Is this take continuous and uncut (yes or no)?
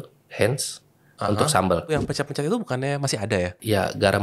no